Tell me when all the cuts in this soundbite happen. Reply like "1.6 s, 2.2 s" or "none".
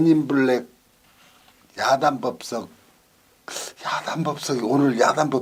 none